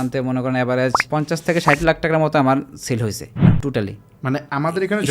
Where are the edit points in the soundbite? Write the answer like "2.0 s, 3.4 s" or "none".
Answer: 1.0 s, 3.3 s